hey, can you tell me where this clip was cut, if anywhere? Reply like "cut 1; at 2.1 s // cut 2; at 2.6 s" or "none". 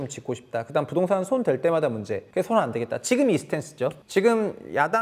cut 1; at 2.2 s // cut 2; at 4.0 s